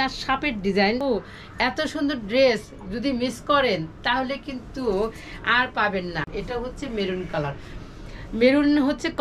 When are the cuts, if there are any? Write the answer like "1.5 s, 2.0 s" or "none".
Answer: 1.0 s, 6.4 s